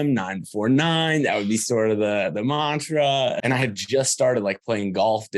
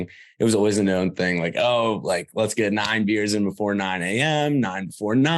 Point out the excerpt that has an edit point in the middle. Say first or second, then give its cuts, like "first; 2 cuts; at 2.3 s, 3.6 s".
first; 1 cut; at 3.4 s